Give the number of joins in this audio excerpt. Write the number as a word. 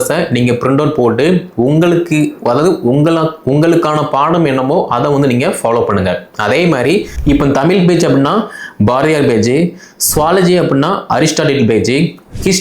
one